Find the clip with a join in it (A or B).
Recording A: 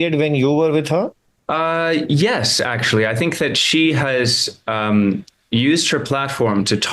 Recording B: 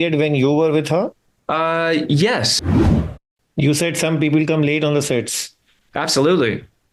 B